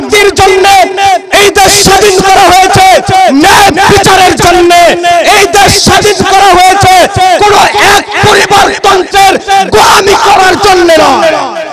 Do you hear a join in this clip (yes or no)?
no